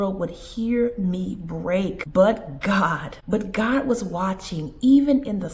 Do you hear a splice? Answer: yes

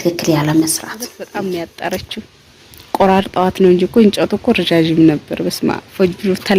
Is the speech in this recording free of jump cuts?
no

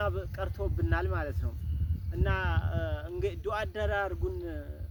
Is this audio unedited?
yes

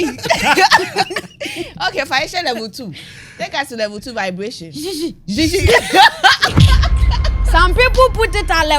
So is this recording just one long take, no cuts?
yes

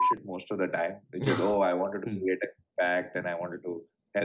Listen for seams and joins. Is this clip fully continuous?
yes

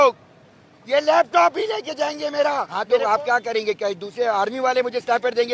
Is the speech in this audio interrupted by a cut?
yes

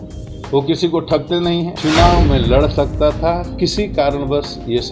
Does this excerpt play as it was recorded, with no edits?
no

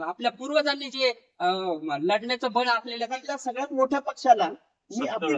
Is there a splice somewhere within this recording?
yes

